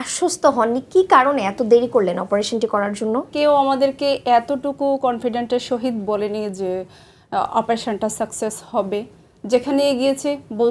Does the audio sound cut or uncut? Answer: cut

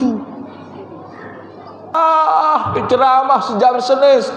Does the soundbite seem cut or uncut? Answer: cut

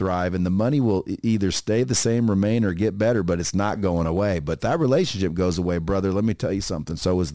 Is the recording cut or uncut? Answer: uncut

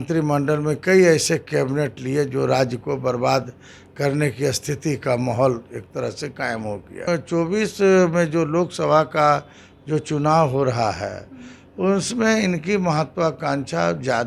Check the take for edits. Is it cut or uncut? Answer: cut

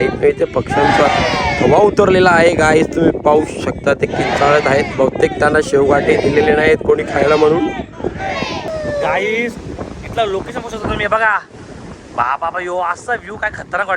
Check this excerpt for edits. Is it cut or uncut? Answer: cut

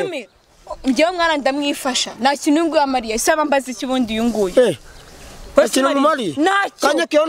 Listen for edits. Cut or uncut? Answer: uncut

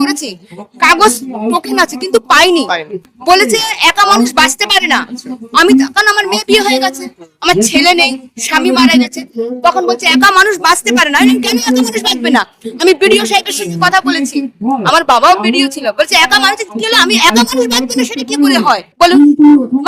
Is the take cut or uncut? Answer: uncut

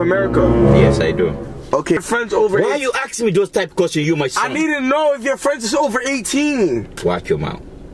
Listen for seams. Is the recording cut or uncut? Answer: cut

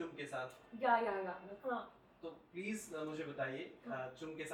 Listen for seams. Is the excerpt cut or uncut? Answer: uncut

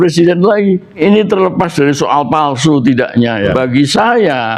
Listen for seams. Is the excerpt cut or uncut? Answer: cut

